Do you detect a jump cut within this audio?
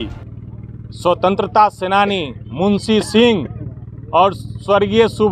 no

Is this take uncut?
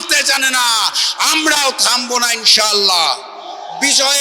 yes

